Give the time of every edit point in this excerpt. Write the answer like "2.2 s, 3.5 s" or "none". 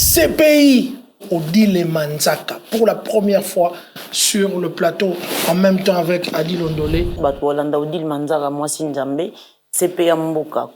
1.2 s, 7.1 s